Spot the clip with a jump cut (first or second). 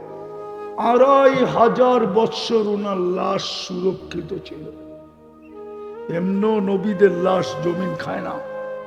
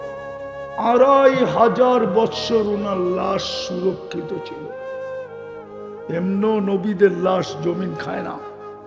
second